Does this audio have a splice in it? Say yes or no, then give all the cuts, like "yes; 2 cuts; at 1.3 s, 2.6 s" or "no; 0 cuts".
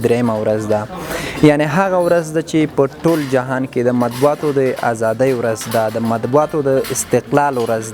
no; 0 cuts